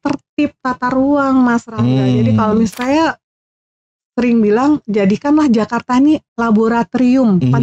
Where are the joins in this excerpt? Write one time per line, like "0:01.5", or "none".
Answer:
0:02.7